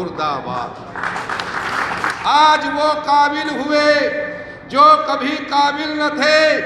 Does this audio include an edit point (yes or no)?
yes